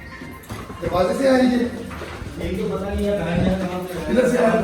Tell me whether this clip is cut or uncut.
uncut